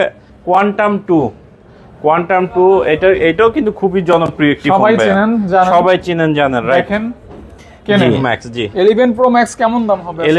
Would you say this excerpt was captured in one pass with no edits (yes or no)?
no